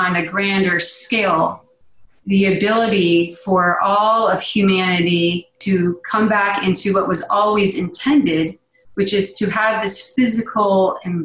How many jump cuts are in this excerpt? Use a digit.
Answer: 1